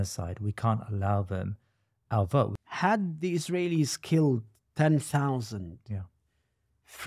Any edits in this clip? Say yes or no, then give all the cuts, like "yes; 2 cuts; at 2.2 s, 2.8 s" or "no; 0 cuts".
yes; 1 cut; at 2.6 s